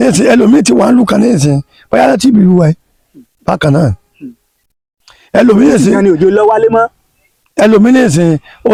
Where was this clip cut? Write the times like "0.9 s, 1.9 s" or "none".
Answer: none